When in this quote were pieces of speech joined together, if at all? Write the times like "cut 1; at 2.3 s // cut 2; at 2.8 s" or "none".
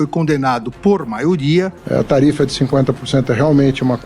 cut 1; at 1.8 s